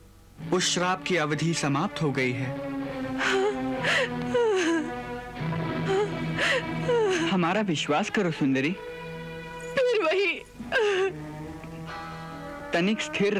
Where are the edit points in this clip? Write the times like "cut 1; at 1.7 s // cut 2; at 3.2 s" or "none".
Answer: none